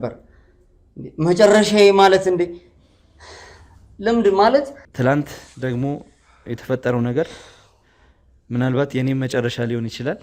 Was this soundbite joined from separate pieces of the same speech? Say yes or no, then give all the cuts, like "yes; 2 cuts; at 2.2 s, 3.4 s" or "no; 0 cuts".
yes; 1 cut; at 4.8 s